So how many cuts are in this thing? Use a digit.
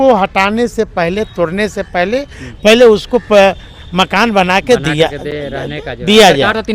0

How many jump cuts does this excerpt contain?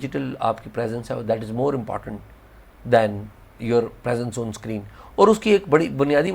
0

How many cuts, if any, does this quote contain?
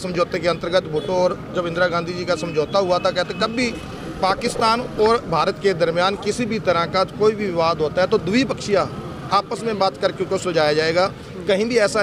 0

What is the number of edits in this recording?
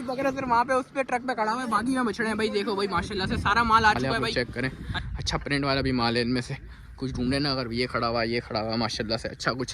1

